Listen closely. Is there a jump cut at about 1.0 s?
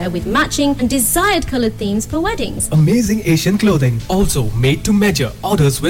no; 0 cuts

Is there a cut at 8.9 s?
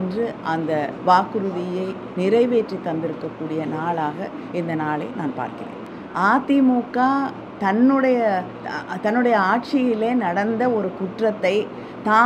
no; 1 cut; at 5.8 s

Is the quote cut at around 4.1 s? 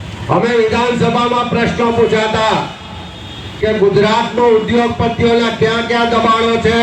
no; 0 cuts

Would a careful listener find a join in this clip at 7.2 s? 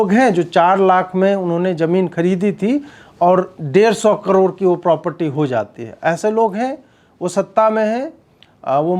no; 0 cuts

